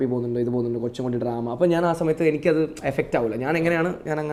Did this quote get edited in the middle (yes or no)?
no